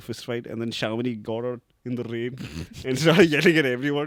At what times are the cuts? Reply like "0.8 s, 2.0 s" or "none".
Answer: none